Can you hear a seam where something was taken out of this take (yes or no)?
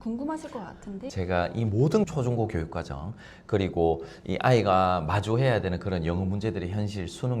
yes